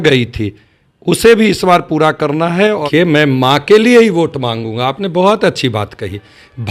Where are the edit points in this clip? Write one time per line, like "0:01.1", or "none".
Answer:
0:02.8

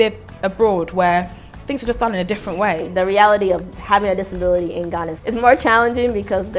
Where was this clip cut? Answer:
0:02.9
0:05.1

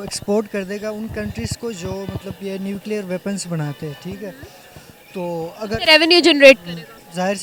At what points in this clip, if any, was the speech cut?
none

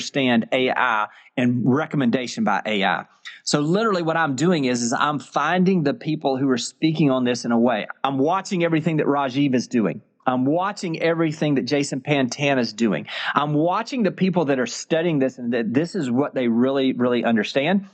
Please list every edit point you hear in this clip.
0:07.9

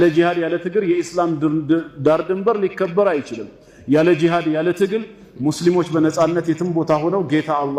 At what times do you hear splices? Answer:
none

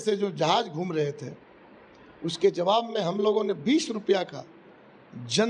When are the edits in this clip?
none

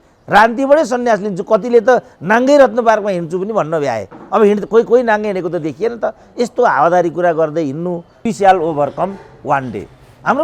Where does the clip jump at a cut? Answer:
0:08.3

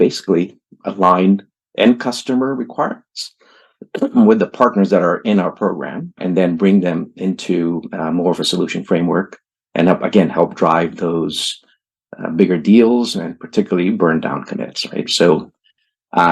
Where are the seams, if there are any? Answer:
0:06.2

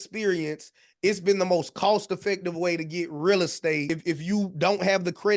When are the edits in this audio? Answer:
0:03.9

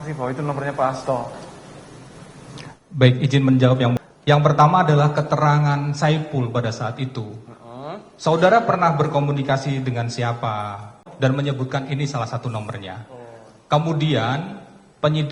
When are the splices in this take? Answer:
0:04.0
0:11.1

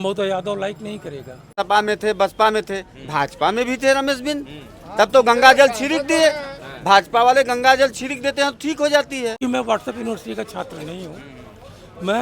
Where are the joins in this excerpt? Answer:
0:01.5
0:09.4

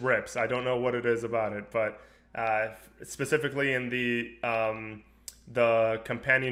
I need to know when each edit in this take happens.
none

